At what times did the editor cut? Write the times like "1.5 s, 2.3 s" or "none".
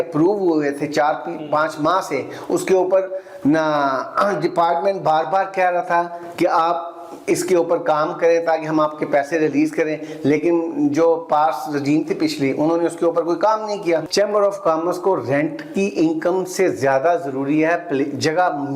14.1 s